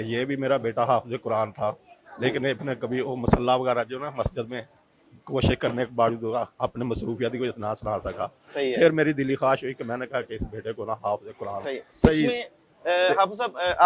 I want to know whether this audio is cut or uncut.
uncut